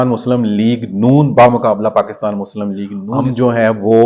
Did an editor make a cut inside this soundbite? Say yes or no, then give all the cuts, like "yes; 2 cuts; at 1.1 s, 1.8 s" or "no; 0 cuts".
yes; 1 cut; at 2.9 s